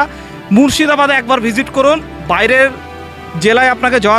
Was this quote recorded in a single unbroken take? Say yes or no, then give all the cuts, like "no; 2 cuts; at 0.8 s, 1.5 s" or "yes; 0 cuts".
yes; 0 cuts